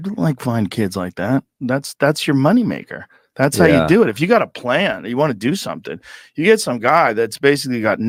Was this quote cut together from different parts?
no; 0 cuts

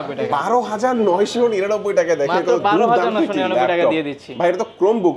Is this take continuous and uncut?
yes; 0 cuts

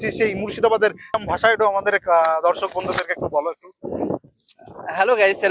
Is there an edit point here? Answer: yes; 1 cut; at 1.2 s

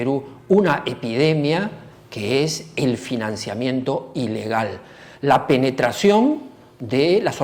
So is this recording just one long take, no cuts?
yes; 0 cuts

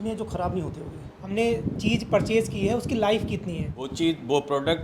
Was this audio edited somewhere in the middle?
yes; 2 cuts; at 1.2 s, 3.8 s

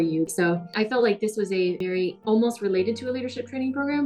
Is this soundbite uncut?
no; 2 cuts; at 0.7 s, 2.0 s

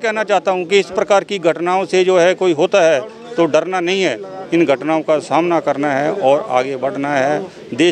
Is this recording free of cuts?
yes; 0 cuts

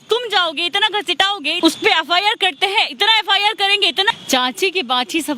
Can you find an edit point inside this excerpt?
yes; 2 cuts; at 1.5 s, 4.1 s

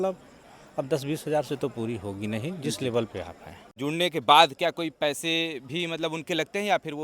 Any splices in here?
yes; 1 cut; at 3.7 s

